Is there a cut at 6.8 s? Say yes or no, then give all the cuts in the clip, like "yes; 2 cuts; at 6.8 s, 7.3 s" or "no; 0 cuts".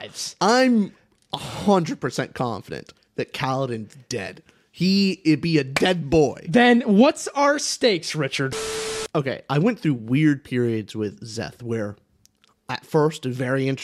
no; 1 cut; at 8.6 s